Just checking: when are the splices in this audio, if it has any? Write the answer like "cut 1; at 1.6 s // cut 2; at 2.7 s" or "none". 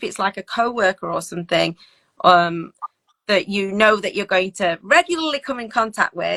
none